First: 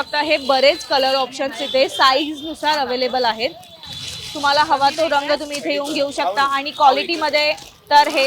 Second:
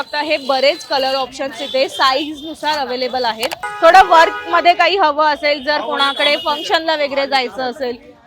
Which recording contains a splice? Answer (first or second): second